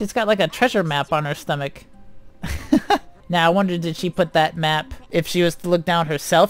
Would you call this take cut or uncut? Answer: cut